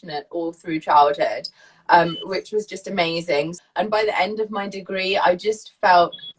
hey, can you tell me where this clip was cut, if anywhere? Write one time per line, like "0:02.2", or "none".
0:03.5